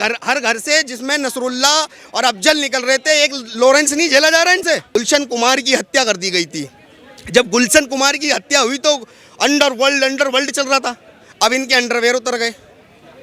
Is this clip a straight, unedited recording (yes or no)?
no